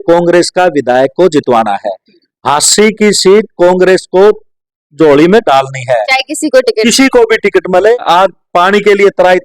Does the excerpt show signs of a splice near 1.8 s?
no; 1 cut; at 8.0 s

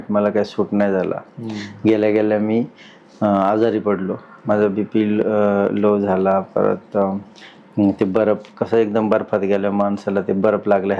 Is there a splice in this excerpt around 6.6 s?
no; 0 cuts

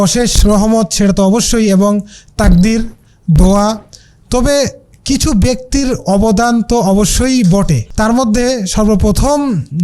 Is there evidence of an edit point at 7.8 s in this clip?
yes; 1 cut; at 7.8 s

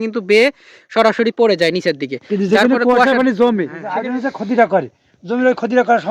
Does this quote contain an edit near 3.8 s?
yes; 1 cut; at 3.8 s

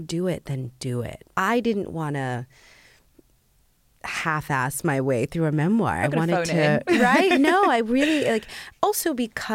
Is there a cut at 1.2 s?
yes; 1 cut; at 1.2 s

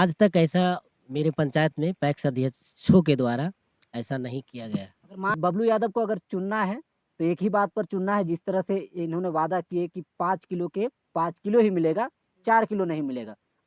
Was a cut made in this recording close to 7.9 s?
no; 1 cut; at 5.4 s

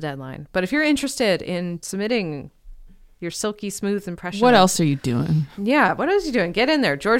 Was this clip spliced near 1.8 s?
yes; 1 cut; at 1.8 s

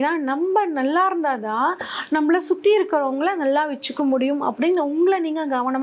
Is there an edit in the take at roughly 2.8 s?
no; 0 cuts

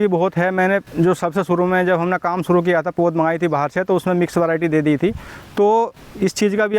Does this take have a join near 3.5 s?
no; 1 cut; at 5.3 s

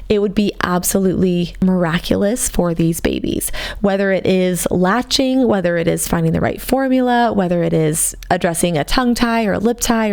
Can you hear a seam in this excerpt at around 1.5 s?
yes; 1 cut; at 1.5 s

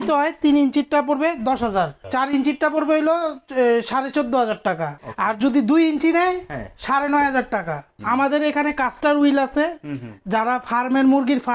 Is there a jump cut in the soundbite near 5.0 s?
yes; 3 cuts; at 2.0 s, 5.0 s, 7.9 s

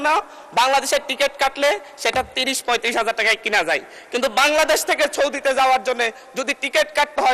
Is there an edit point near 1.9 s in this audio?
no; 0 cuts

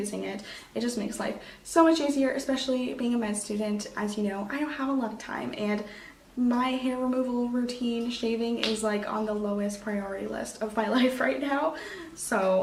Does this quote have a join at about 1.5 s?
no; 0 cuts

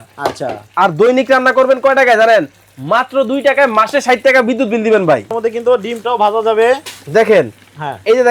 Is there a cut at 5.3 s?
yes; 1 cut; at 5.3 s

